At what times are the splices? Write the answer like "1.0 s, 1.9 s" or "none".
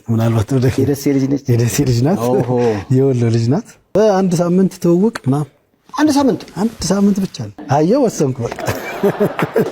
3.9 s, 7.5 s